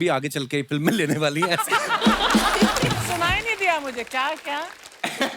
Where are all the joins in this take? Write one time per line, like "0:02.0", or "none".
0:03.0